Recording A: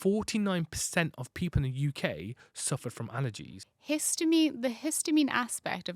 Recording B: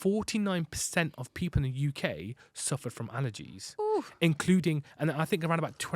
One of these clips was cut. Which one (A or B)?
A